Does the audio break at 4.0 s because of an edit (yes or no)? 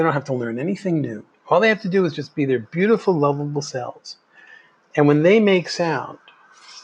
no